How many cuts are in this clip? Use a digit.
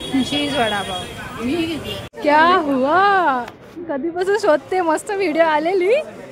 1